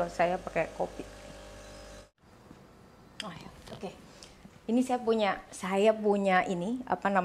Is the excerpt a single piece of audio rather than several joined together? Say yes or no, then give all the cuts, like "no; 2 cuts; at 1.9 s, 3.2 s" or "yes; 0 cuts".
no; 1 cut; at 2.1 s